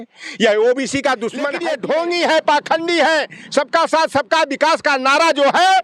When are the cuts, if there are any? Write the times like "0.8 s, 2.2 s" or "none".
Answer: 1.6 s

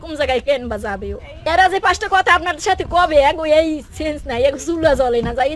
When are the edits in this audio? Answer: 1.3 s

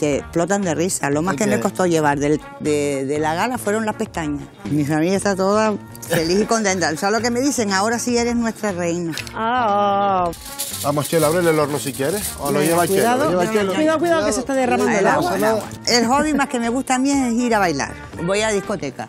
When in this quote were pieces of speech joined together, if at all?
4.5 s, 5.9 s, 10.4 s, 15.8 s, 18.1 s

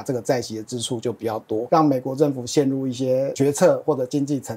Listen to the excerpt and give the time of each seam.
1.6 s, 3.3 s

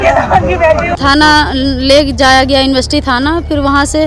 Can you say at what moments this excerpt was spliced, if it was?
1.0 s

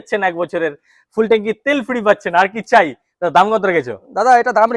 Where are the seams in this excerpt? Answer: none

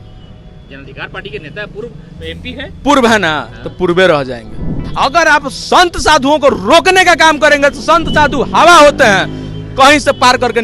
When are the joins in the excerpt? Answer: 4.8 s

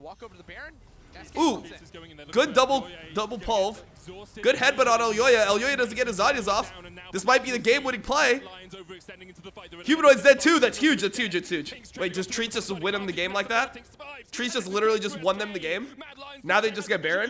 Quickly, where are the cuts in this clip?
none

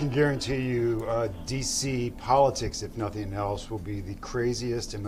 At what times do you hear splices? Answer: none

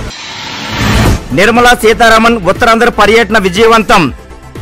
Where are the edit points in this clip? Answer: none

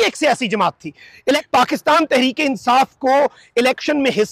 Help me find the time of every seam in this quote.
1.4 s

